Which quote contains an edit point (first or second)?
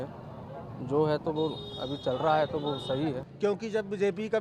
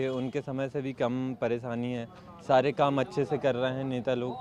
first